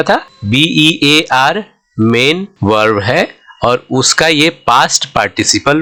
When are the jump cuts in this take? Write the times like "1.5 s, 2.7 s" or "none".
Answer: none